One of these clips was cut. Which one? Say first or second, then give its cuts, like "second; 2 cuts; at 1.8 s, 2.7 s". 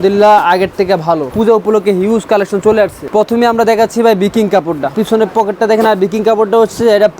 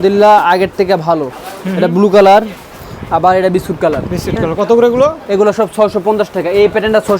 first; 3 cuts; at 1.3 s, 3.0 s, 4.9 s